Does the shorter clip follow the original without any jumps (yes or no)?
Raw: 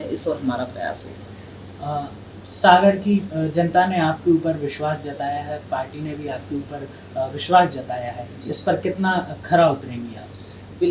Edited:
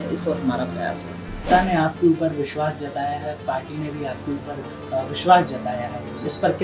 no